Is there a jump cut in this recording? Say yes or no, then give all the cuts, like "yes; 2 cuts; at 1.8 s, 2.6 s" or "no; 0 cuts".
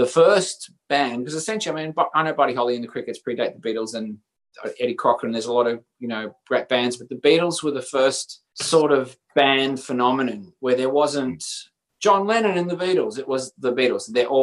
no; 0 cuts